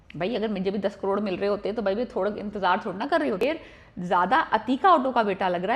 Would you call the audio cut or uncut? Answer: cut